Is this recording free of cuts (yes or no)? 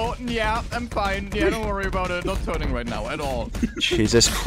yes